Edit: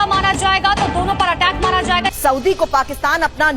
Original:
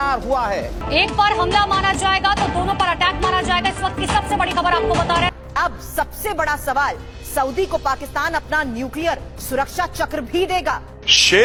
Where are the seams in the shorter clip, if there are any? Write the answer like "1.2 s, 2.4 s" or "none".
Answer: 2.1 s

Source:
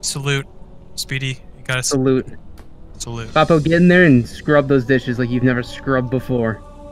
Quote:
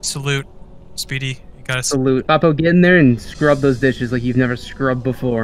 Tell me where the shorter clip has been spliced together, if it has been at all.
2.2 s

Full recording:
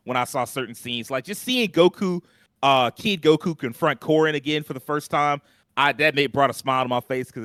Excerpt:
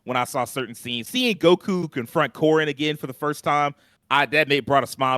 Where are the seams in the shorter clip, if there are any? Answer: 1.0 s, 2.0 s

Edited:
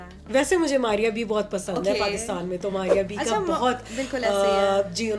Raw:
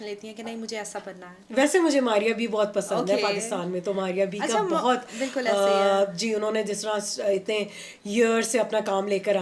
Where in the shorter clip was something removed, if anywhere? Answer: none

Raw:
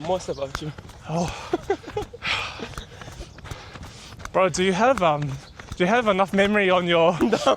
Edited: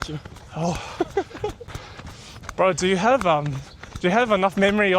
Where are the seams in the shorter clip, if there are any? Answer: 1.7 s

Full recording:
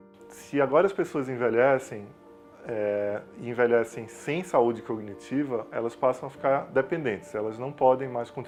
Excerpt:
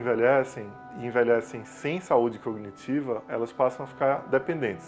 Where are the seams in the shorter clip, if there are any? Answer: 0.9 s

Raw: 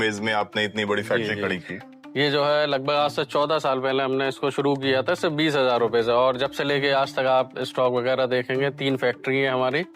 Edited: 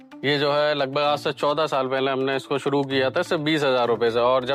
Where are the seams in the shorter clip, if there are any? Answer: none

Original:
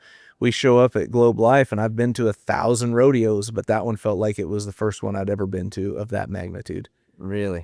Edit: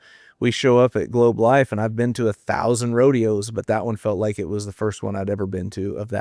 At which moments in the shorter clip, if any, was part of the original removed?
none

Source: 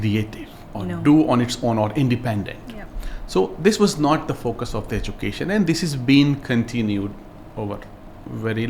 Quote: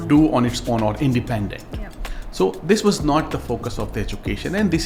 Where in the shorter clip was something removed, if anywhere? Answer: none

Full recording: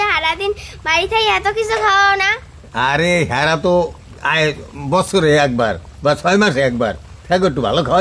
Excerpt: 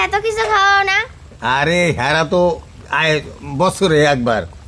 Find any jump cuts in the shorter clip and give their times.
none

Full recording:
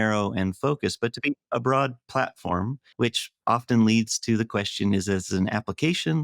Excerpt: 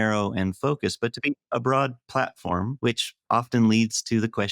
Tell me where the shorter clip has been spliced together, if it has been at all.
2.7 s

